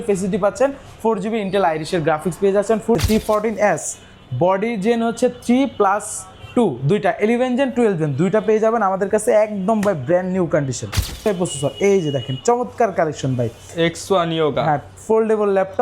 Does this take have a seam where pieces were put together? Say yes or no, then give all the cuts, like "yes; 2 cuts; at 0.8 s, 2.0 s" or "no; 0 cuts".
yes; 2 cuts; at 2.9 s, 11.3 s